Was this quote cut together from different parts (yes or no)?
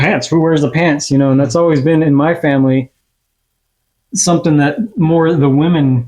no